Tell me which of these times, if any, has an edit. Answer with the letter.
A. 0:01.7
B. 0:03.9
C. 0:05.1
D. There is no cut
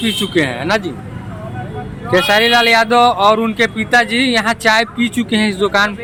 D